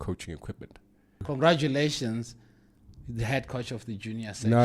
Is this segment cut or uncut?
cut